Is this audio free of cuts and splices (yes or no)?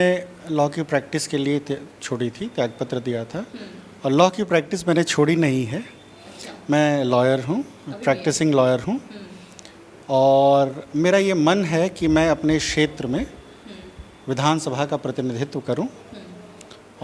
yes